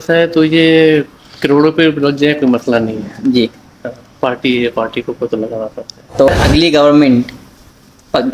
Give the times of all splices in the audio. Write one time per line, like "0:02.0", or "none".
0:06.3